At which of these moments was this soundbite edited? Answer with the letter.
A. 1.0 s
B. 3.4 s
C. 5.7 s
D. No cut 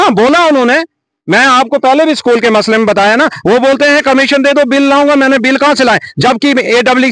D